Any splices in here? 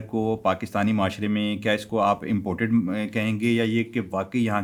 no; 0 cuts

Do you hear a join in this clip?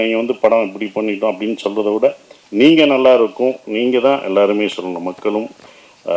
no; 0 cuts

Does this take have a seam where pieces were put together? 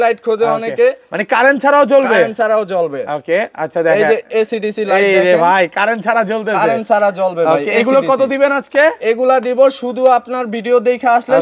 no; 0 cuts

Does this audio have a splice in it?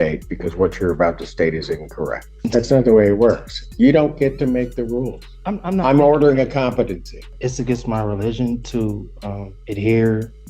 yes; 2 cuts; at 2.3 s, 7.3 s

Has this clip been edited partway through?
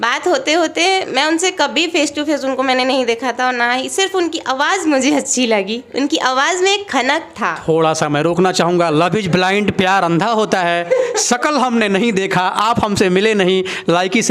no; 0 cuts

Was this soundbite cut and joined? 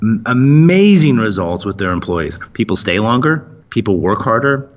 yes; 1 cut; at 3.5 s

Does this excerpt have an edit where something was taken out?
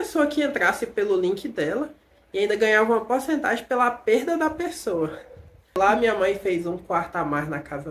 yes; 1 cut; at 6.0 s

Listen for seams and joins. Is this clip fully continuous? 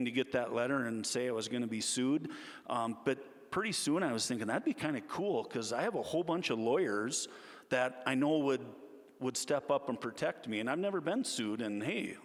yes; 0 cuts

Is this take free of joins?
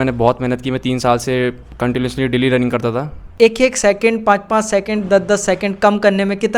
no; 1 cut; at 3.2 s

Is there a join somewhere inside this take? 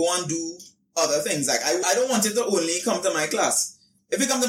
yes; 1 cut; at 1.8 s

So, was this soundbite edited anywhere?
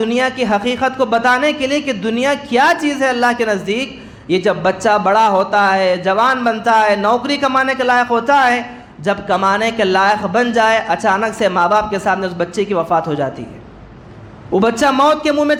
no; 0 cuts

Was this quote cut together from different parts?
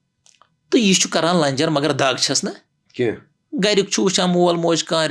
no; 0 cuts

